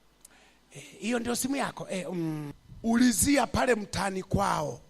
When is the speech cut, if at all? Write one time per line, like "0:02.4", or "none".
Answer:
0:02.5